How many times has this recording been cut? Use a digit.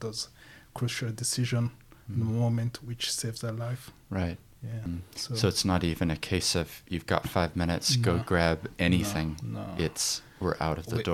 1